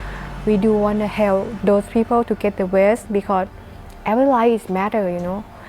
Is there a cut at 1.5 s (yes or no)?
yes